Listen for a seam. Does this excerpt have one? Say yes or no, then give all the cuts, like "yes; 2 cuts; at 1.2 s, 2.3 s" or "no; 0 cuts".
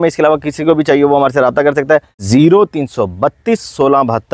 yes; 1 cut; at 2.2 s